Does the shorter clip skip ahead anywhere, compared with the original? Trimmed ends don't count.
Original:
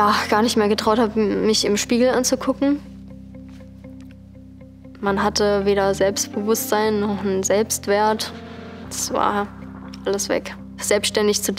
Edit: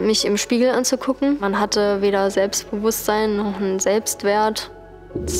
yes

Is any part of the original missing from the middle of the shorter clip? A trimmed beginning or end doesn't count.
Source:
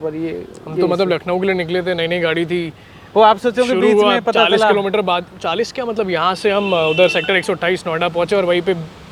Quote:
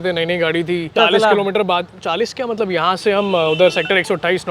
yes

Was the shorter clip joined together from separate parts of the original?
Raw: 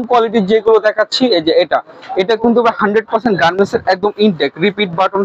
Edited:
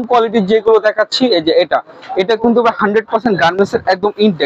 no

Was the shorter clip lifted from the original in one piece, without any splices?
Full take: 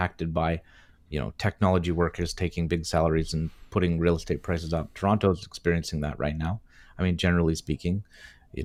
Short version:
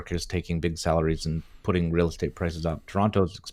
yes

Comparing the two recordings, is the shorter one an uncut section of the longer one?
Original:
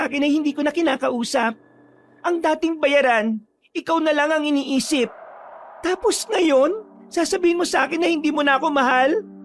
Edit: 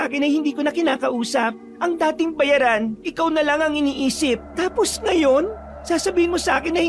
no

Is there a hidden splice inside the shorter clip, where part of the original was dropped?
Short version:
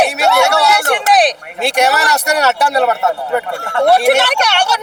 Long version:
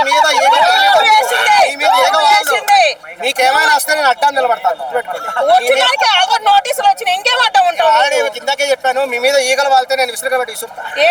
no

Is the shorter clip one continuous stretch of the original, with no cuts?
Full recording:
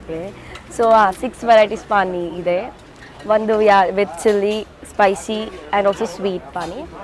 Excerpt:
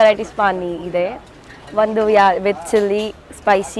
yes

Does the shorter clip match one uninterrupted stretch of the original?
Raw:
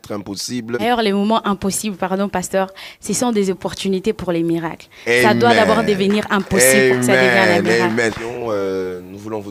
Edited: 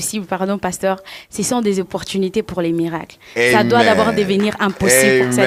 yes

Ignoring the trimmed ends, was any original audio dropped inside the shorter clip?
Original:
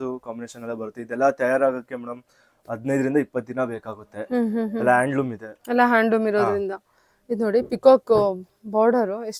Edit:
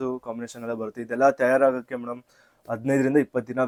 no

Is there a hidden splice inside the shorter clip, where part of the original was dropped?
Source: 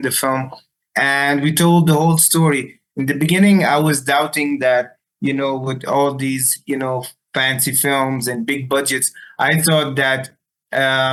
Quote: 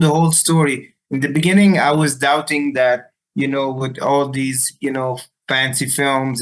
no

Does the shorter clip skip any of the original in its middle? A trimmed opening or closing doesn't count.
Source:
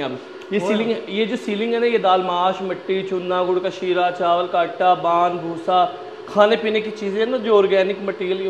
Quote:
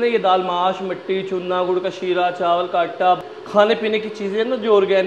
yes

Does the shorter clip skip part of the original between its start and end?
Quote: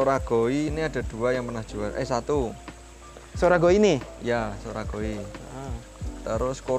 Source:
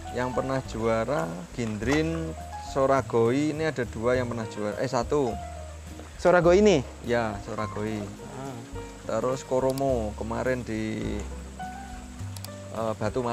no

